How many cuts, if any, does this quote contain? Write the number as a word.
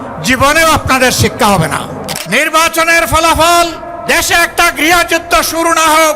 one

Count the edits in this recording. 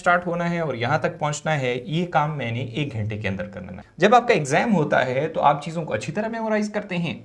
one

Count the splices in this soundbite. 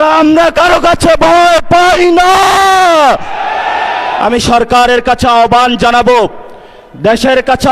one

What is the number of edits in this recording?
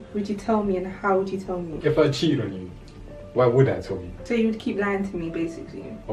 two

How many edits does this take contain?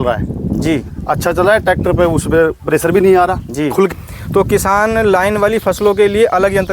one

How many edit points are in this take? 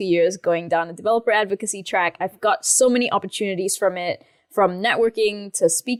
zero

